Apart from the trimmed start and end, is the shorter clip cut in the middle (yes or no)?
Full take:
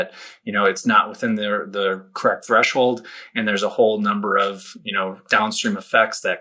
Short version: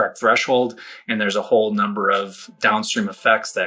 yes